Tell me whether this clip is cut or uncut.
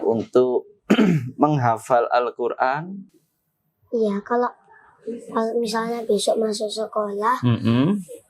uncut